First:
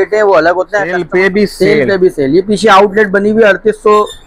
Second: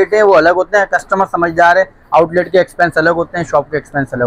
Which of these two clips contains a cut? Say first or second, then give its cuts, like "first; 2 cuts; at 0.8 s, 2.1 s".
first; 1 cut; at 1.0 s